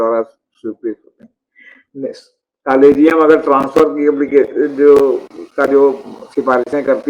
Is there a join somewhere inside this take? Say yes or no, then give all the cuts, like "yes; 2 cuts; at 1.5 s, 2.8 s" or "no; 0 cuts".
no; 0 cuts